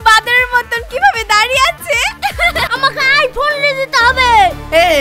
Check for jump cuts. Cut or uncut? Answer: cut